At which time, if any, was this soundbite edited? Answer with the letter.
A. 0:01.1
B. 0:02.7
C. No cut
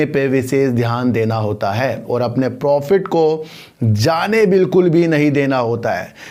C